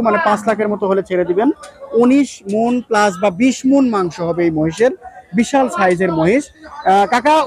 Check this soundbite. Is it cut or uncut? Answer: uncut